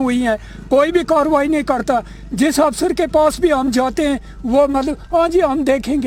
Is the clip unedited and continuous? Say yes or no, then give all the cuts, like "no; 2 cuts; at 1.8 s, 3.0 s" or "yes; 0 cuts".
yes; 0 cuts